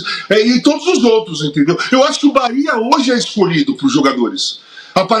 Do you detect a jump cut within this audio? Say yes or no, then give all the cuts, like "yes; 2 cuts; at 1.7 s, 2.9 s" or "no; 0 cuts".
no; 0 cuts